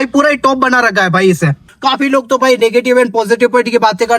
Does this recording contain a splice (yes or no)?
yes